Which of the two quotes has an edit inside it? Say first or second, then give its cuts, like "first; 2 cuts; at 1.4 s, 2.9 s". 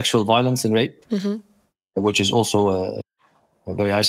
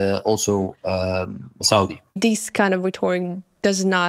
second; 1 cut; at 2.1 s